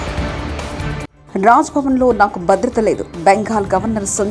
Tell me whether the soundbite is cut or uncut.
uncut